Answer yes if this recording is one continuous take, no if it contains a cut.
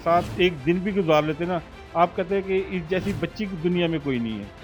yes